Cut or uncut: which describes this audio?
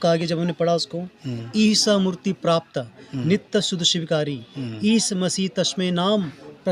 uncut